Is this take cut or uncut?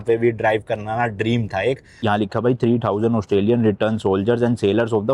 cut